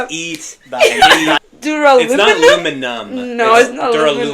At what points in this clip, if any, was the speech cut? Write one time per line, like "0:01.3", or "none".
0:01.5